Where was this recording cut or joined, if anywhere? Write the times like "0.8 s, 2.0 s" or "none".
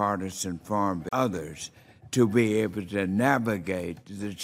none